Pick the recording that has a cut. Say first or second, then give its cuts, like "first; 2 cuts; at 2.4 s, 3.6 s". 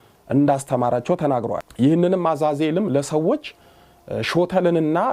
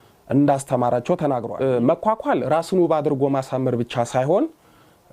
second; 1 cut; at 1.5 s